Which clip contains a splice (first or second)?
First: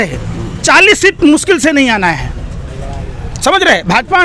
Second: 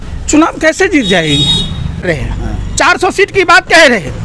second